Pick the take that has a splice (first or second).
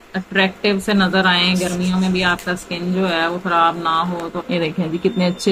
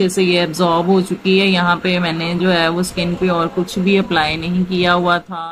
first